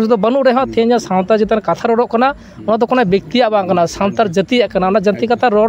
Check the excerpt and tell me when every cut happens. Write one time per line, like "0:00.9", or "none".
none